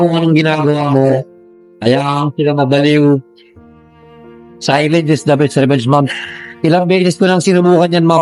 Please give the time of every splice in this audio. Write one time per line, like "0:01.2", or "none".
none